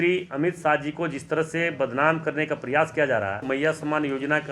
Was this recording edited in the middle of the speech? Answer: yes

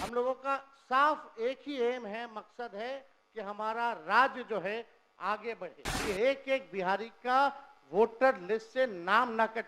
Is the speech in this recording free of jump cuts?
no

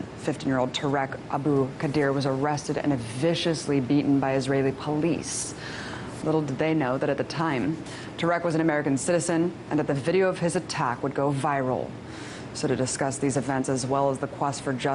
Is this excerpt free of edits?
no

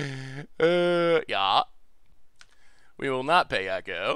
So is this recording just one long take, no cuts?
yes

